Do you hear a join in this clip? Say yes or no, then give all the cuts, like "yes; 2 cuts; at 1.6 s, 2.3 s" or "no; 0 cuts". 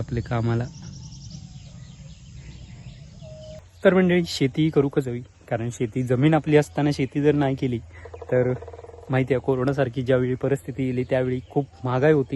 yes; 1 cut; at 3.6 s